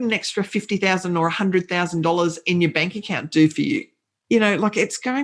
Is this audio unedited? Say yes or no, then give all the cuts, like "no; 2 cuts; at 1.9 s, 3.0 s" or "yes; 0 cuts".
yes; 0 cuts